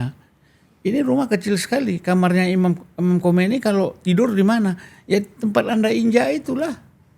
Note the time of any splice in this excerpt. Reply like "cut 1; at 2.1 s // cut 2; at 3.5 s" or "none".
none